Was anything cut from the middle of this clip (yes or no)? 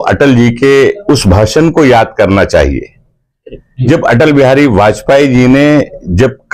no